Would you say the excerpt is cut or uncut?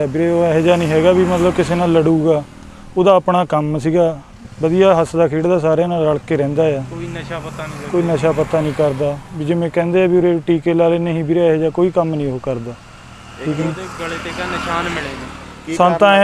uncut